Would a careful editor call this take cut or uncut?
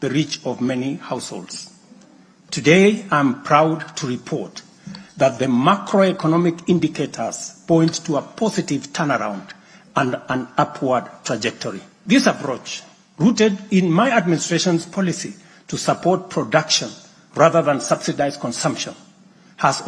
cut